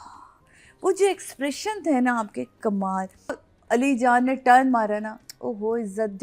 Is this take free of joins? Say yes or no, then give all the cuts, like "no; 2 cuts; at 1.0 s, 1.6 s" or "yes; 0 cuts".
no; 1 cut; at 3.4 s